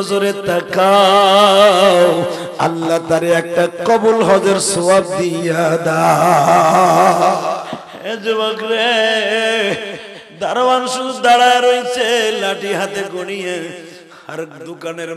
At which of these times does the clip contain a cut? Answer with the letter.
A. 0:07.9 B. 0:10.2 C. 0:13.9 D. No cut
A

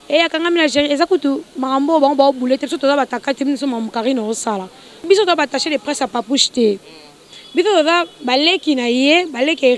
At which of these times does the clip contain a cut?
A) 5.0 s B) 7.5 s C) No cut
A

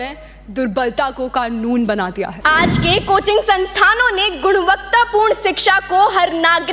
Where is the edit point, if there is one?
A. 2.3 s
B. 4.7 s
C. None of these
A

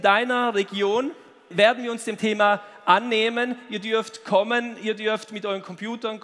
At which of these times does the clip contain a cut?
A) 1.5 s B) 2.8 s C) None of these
A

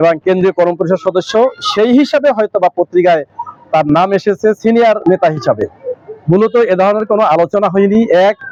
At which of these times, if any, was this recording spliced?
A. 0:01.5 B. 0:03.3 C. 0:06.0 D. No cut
D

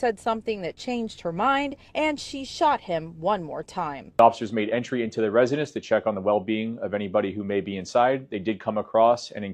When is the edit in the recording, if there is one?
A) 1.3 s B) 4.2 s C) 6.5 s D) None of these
B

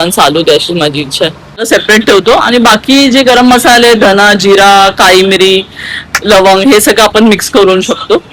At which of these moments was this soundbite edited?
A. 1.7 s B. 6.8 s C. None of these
A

